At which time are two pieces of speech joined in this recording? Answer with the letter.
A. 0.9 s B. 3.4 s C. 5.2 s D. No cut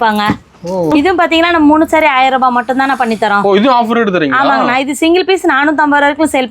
A